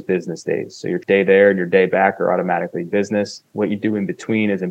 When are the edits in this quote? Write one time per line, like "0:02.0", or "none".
0:01.0